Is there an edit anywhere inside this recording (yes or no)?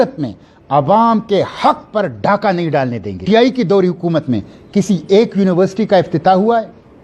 yes